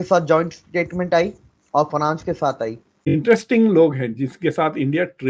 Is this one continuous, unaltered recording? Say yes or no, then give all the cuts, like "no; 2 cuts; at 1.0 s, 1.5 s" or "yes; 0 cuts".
no; 1 cut; at 3.1 s